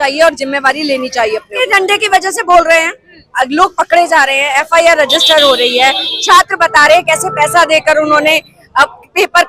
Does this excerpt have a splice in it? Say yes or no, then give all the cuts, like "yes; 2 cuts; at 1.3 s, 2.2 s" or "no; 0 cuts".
no; 0 cuts